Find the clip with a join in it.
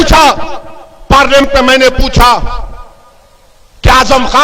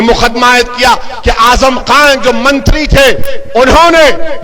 first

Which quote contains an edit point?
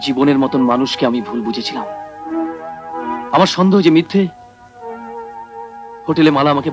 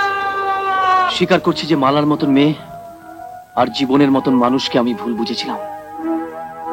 second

